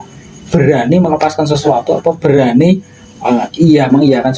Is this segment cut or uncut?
uncut